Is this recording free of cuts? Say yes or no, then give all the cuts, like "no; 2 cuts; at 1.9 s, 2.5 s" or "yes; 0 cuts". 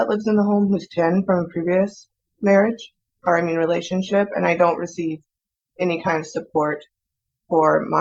yes; 0 cuts